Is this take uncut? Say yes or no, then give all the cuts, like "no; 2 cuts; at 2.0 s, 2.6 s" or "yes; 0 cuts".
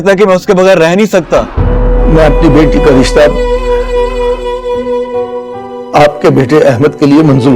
no; 1 cut; at 1.5 s